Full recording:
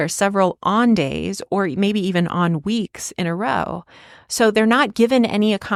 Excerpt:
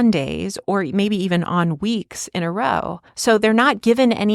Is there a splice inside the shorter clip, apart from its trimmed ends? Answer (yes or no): yes